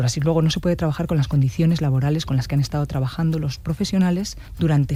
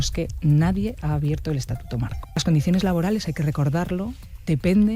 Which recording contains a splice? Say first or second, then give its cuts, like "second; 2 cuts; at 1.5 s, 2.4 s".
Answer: second; 1 cut; at 2.4 s